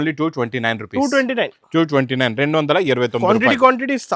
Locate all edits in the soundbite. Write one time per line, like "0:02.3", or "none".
none

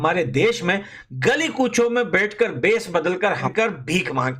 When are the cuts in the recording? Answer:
0:03.5

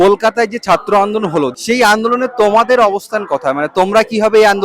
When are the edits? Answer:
0:01.5

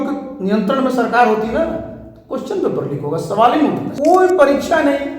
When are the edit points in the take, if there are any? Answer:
0:03.9

